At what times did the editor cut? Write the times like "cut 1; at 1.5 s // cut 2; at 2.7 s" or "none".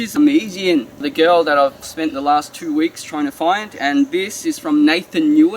cut 1; at 1.1 s // cut 2; at 1.8 s

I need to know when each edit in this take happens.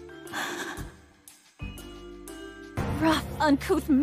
cut 1; at 2.8 s

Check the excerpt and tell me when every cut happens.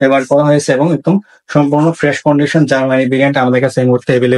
none

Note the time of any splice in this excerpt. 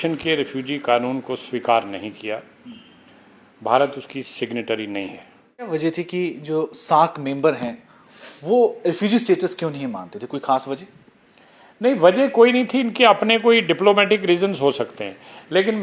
cut 1; at 5.7 s

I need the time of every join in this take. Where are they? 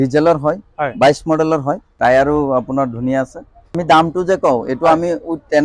cut 1; at 1.9 s // cut 2; at 3.8 s

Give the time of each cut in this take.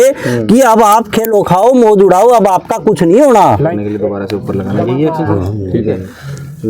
cut 1; at 3.7 s

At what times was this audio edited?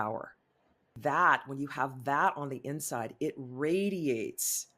cut 1; at 1.0 s

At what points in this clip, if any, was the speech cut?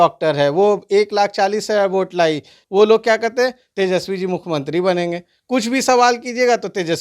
cut 1; at 2.5 s

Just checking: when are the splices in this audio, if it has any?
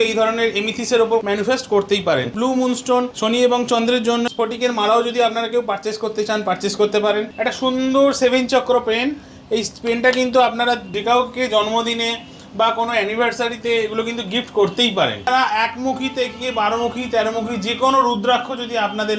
cut 1; at 1.2 s // cut 2; at 2.4 s // cut 3; at 3.1 s // cut 4; at 4.3 s // cut 5; at 7.3 s // cut 6; at 10.9 s // cut 7; at 15.3 s

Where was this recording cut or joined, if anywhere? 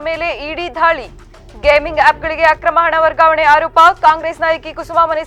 none

